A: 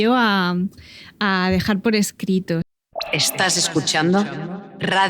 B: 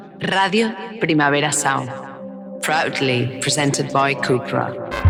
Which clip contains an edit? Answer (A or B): A